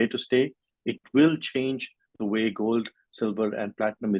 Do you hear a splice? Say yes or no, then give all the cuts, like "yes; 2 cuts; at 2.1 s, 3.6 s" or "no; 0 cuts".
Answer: no; 0 cuts